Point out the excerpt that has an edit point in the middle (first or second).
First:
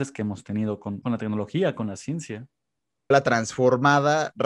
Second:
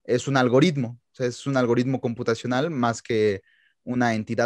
first